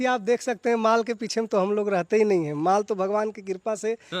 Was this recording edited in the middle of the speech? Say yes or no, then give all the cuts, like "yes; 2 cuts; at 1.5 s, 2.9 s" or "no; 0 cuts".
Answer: no; 0 cuts